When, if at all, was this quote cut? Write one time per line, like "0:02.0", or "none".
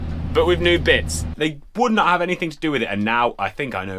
0:01.2